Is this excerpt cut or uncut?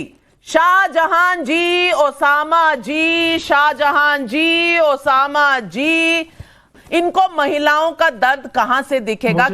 cut